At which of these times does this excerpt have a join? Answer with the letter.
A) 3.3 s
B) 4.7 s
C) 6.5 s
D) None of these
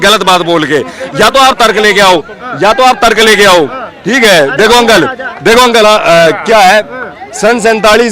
D